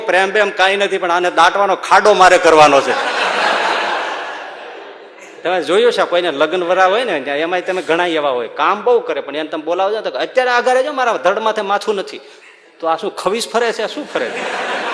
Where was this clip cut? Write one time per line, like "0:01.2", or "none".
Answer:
0:05.2